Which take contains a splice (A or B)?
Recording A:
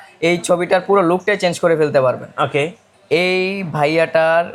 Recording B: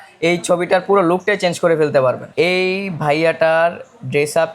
B